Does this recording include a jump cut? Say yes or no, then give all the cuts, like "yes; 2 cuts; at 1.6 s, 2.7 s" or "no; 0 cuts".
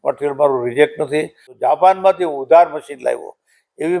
yes; 1 cut; at 1.5 s